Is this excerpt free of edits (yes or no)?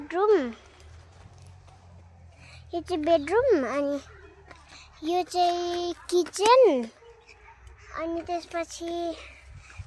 yes